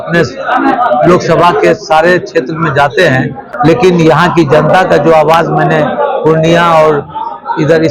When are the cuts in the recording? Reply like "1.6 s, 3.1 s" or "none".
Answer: 3.4 s